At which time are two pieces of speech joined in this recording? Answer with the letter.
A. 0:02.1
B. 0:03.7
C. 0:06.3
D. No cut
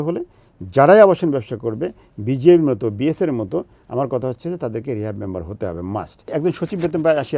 C